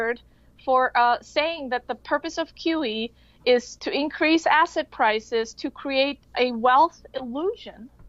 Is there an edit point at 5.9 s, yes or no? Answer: no